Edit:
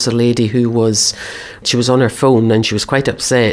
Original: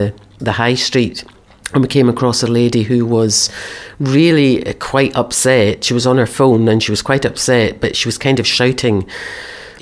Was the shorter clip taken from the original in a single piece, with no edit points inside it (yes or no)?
no